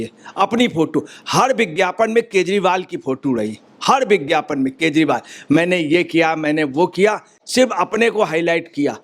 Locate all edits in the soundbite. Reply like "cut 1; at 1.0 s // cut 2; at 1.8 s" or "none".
none